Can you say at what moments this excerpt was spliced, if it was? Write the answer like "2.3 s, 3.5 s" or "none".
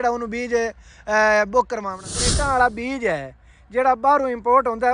2.3 s